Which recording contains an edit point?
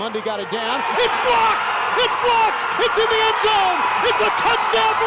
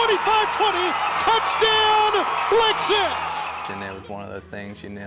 second; 1 cut; at 3.6 s

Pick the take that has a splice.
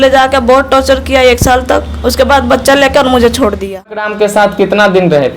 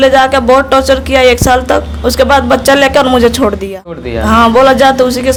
first; 1 cut; at 4.1 s

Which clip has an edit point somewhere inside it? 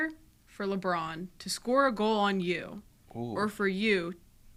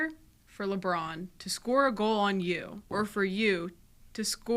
second; 1 cut; at 2.8 s

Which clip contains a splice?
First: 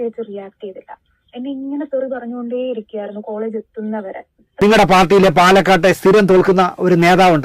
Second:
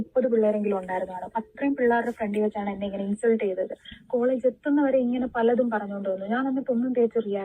first; 1 cut; at 4.6 s

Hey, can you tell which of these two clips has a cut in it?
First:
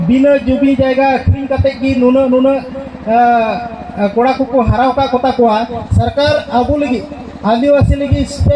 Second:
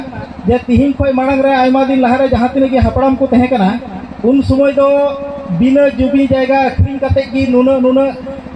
first; 1 cut; at 5.8 s

